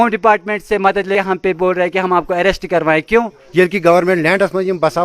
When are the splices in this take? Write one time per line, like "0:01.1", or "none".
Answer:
0:01.1
0:03.3